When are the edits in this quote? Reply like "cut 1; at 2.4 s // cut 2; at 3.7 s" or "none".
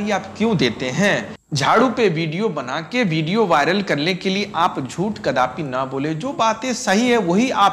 cut 1; at 1.4 s

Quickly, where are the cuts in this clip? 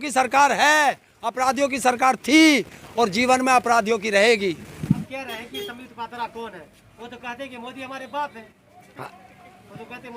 cut 1; at 5.1 s

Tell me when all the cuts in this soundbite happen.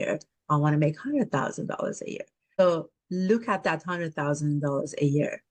cut 1; at 2.6 s

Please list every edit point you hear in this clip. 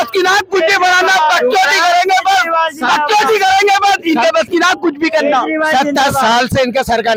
none

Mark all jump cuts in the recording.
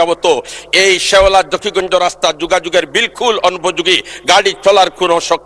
none

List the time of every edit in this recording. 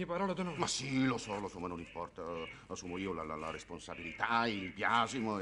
none

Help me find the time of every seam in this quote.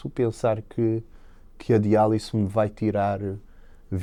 none

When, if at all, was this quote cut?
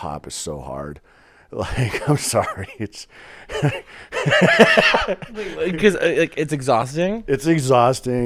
none

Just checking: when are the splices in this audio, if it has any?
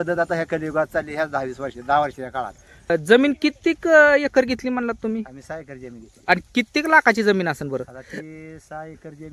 cut 1; at 2.9 s

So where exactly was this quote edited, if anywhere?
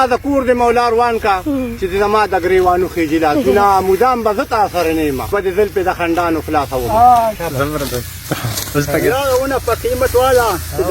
cut 1; at 5.3 s // cut 2; at 7.3 s

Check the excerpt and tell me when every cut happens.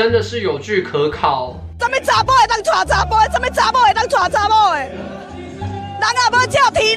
cut 1; at 1.6 s

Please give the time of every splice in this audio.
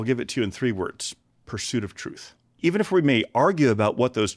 cut 1; at 2.5 s

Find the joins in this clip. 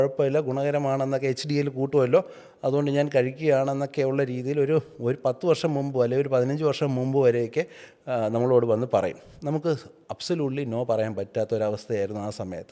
none

